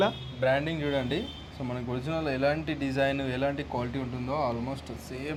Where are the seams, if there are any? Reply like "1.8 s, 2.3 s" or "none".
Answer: none